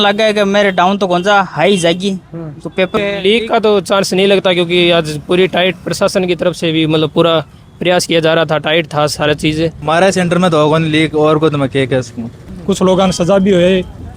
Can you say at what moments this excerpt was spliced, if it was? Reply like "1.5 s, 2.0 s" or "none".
3.0 s, 9.8 s, 12.4 s

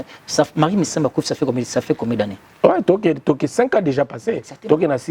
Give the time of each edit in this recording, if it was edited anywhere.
2.4 s

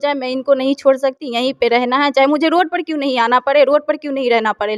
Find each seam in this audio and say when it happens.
none

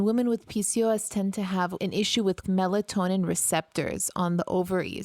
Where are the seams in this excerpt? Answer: 1.8 s

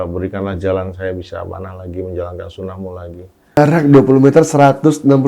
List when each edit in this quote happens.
3.6 s

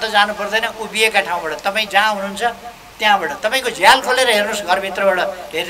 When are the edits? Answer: none

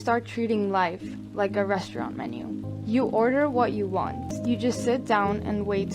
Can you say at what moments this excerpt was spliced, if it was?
2.7 s, 4.3 s

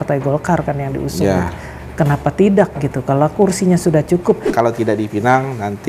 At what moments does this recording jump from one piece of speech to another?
4.5 s

